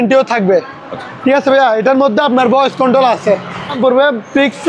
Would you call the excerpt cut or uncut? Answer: cut